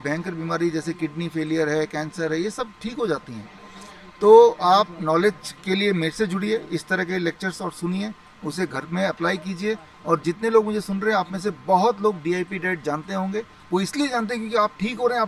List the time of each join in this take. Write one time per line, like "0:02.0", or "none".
none